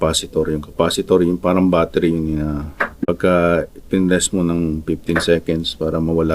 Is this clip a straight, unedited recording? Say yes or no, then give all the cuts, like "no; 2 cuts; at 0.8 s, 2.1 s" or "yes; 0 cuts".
no; 1 cut; at 3.0 s